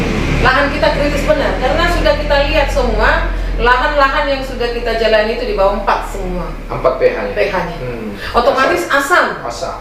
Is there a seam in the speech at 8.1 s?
yes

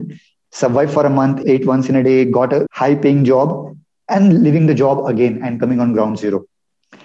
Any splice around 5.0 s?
no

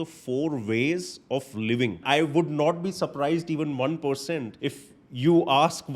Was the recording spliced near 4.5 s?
yes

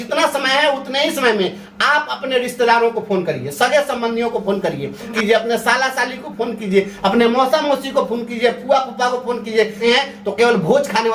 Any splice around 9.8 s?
yes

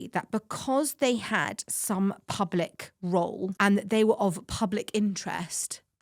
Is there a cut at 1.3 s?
no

